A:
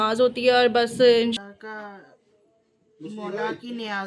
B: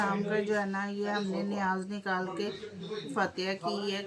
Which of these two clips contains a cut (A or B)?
A